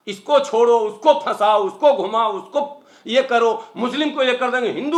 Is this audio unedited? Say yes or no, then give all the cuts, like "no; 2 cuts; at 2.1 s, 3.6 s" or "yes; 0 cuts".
yes; 0 cuts